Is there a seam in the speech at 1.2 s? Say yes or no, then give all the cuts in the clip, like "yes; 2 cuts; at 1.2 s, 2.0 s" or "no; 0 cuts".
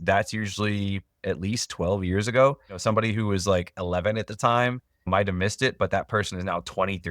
no; 1 cut; at 2.8 s